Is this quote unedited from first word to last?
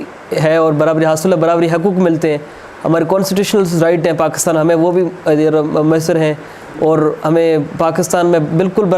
yes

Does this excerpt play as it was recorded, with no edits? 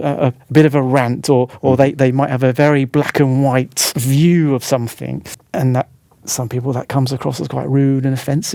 yes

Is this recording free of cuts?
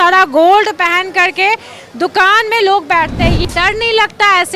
no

